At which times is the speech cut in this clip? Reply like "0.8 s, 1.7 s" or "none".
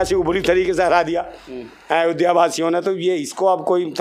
none